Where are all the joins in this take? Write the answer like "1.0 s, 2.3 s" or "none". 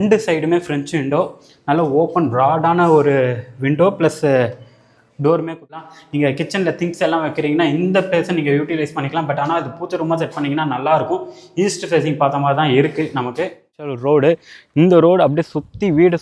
5.9 s, 14.0 s